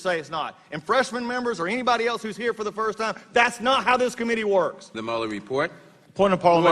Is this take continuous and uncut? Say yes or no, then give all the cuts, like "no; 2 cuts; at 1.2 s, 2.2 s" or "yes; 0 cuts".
no; 1 cut; at 4.9 s